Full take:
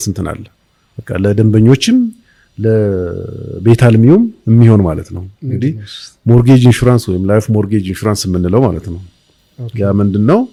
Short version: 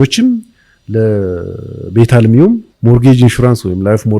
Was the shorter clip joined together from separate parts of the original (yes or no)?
yes